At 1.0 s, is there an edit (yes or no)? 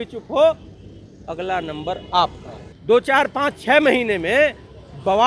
no